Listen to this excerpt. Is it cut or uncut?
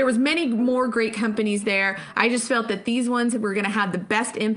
uncut